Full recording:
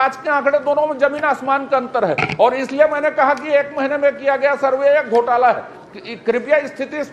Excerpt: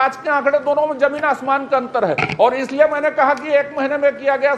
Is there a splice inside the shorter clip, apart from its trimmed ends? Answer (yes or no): no